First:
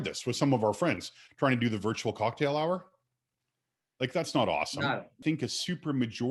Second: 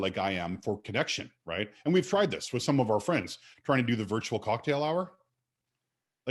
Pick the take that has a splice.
first; 1 cut; at 5.2 s

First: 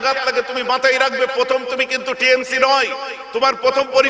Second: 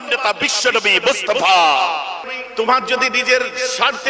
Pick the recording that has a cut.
second; 1 cut; at 2.4 s

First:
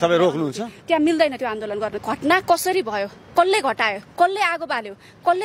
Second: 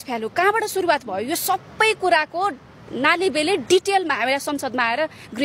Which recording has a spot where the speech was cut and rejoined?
first; 1 cut; at 2.0 s

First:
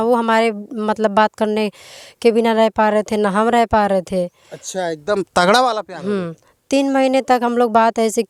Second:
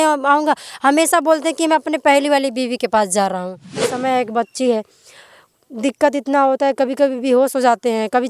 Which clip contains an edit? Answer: second; 1 cut; at 3.9 s

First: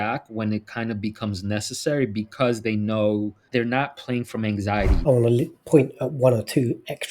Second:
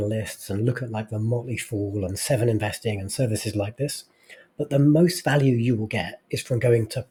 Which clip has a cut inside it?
first; 2 cuts; at 3.4 s, 5.0 s

